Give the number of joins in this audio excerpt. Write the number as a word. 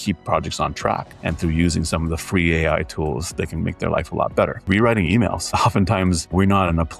one